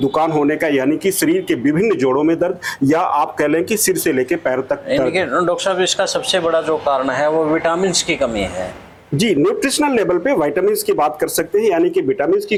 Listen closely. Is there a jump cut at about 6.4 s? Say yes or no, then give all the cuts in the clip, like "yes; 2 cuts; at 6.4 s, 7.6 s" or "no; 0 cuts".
no; 0 cuts